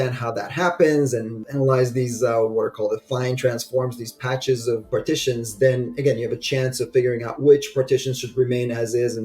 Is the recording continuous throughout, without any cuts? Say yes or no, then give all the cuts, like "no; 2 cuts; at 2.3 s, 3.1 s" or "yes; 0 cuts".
no; 2 cuts; at 1.4 s, 4.8 s